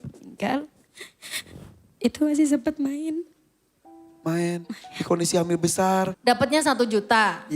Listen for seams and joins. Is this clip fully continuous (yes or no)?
no